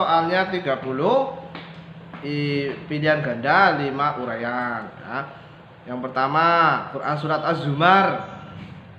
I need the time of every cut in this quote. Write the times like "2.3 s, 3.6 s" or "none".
none